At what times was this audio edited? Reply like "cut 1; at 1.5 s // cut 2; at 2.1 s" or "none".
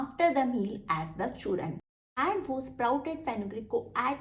cut 1; at 1.9 s